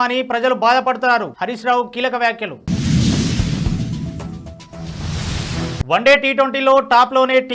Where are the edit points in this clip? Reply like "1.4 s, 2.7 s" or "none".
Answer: 2.3 s, 5.8 s